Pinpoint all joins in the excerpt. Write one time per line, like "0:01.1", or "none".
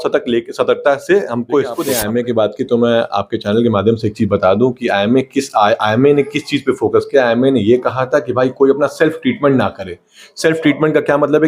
0:01.9